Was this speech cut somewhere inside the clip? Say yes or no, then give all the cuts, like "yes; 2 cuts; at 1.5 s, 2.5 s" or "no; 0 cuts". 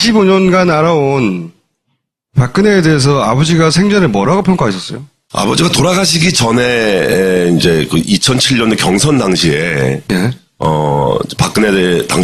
no; 0 cuts